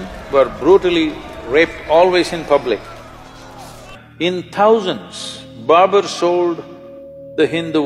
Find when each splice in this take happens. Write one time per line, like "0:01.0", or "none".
0:03.9